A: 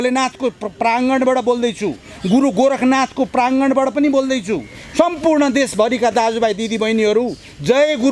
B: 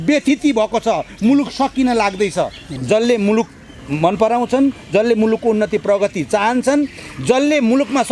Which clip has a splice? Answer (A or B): B